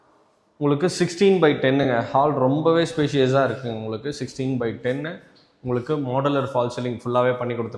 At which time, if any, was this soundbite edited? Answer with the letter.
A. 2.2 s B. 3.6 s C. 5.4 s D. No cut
D